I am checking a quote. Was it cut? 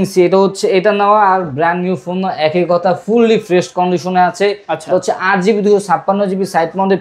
no; 0 cuts

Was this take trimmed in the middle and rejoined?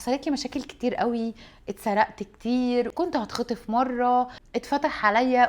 yes; 2 cuts; at 2.9 s, 4.4 s

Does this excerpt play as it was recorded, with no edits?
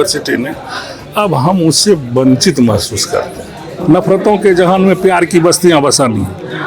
no; 1 cut; at 3.7 s

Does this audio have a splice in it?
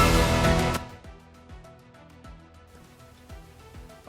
yes; 1 cut; at 2.8 s

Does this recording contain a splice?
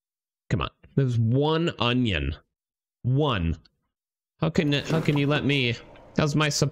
no; 0 cuts

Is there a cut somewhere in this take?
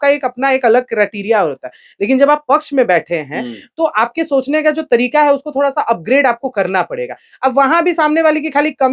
no; 0 cuts

